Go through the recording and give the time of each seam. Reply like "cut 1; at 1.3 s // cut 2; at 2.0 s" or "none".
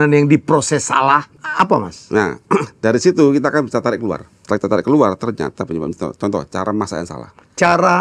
cut 1; at 1.4 s // cut 2; at 4.3 s